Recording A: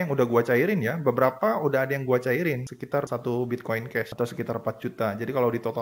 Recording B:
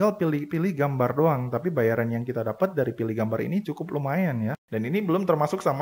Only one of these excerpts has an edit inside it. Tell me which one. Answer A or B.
B